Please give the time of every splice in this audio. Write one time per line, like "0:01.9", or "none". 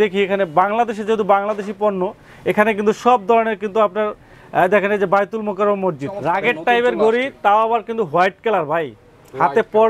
0:06.2